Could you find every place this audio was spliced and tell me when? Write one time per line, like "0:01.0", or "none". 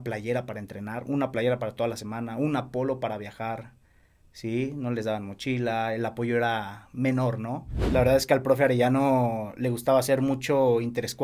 0:07.7

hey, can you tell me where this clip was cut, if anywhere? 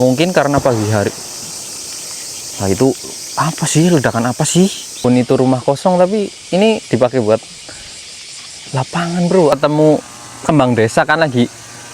0:05.0
0:09.5

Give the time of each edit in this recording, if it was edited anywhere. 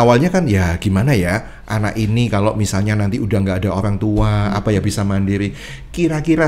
none

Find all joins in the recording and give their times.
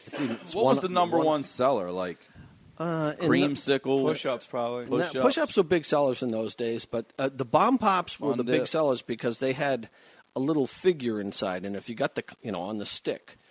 none

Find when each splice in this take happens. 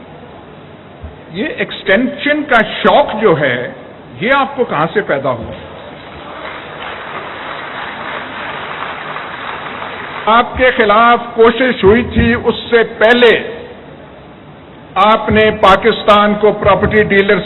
0:10.3

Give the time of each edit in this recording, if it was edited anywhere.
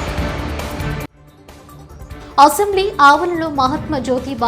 0:02.3

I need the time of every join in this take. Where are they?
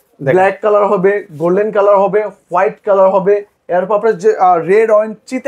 none

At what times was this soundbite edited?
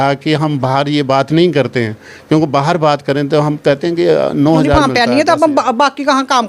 0:04.7

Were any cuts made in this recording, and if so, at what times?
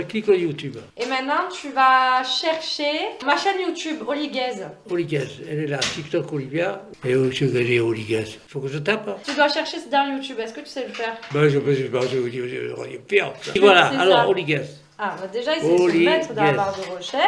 none

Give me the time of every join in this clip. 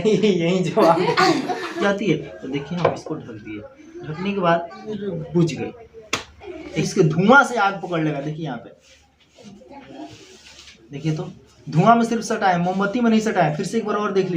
0:01.8
0:04.9
0:06.7

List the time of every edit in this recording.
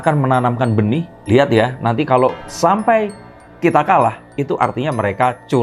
none

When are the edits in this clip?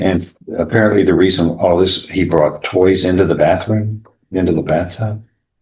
none

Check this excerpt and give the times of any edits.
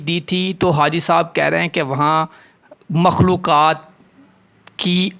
none

